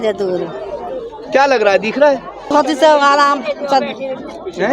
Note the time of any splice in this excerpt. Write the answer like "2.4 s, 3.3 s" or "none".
2.5 s